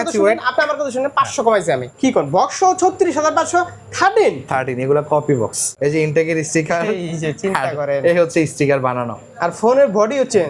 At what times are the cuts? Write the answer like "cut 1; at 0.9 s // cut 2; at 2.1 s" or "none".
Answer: cut 1; at 1.9 s // cut 2; at 5.6 s